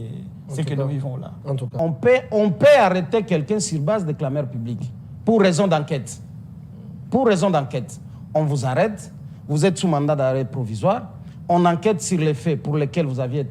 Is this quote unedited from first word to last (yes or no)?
no